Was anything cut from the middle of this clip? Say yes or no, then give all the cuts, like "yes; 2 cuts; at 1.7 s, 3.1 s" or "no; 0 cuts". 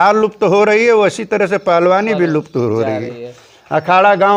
no; 0 cuts